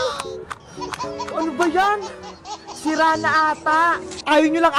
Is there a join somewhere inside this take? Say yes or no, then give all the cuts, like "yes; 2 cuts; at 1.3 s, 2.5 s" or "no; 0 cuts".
no; 0 cuts